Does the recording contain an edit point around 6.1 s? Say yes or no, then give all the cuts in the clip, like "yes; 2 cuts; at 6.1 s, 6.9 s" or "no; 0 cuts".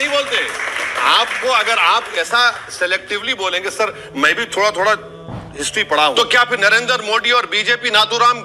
yes; 1 cut; at 6.1 s